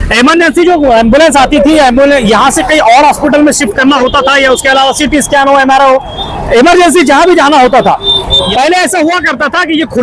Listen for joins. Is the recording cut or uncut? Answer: cut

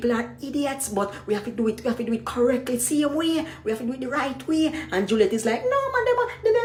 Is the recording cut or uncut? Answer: uncut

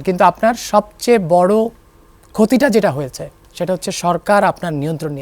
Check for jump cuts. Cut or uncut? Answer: uncut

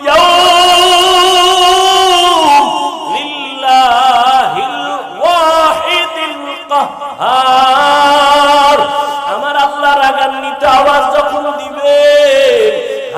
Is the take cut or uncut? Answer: uncut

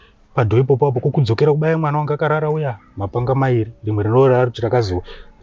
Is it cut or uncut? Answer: uncut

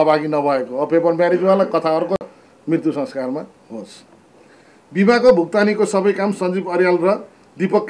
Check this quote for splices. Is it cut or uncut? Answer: uncut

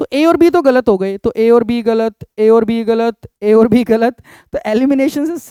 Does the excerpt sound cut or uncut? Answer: uncut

